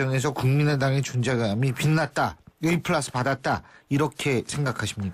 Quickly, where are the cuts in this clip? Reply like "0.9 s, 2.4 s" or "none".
none